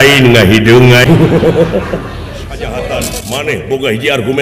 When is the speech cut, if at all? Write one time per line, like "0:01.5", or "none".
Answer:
0:01.0
0:03.1